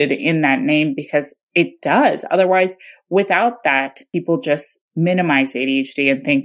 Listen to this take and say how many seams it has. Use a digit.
1